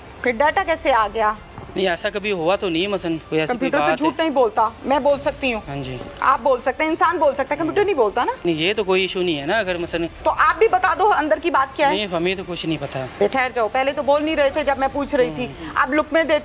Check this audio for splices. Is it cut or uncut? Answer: cut